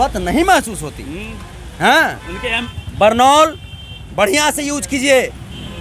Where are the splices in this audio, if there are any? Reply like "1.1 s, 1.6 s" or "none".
2.6 s